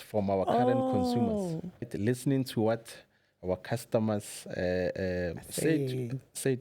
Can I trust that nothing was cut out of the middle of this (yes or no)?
no